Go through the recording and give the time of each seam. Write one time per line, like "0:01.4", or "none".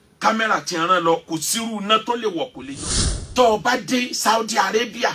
0:02.6